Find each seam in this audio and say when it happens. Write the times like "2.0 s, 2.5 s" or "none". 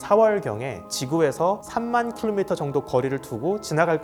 none